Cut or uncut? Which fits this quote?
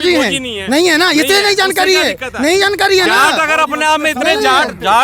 uncut